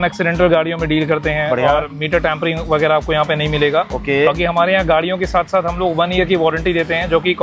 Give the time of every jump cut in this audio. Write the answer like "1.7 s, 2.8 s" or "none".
none

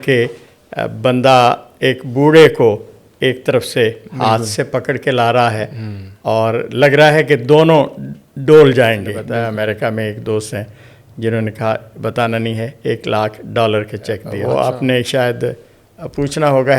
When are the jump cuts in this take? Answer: 9.2 s, 14.3 s

